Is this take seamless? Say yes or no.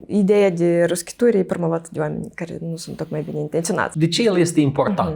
no